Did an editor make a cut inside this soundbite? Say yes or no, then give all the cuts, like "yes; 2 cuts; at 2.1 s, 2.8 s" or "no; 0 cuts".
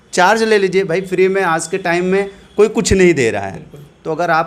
no; 0 cuts